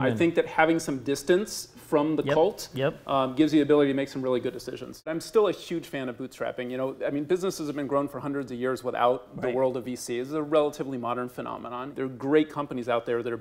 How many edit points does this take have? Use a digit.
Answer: 2